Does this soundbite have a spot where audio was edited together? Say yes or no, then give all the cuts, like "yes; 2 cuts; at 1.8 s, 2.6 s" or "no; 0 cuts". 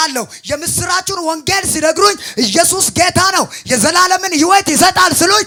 no; 0 cuts